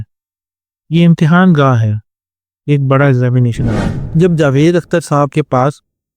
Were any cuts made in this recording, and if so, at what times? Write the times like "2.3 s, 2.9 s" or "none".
3.9 s